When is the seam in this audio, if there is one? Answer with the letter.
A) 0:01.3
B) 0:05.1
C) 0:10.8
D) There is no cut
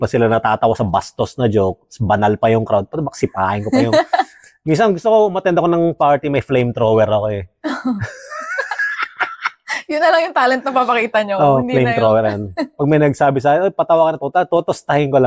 D